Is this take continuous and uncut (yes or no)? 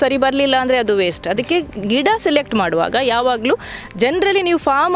yes